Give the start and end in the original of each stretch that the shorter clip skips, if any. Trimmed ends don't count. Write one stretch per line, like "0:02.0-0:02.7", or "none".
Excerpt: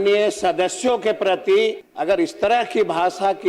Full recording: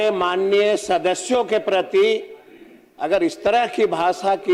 0:02.3-0:02.9